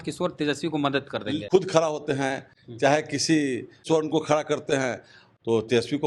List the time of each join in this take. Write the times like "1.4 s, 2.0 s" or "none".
1.4 s, 3.8 s, 5.2 s